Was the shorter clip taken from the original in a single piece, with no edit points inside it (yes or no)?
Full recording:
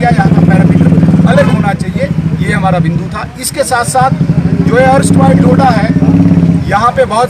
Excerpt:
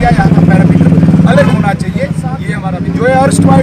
no